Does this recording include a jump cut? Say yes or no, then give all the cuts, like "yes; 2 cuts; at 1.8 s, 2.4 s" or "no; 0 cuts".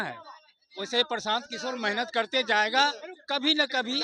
no; 0 cuts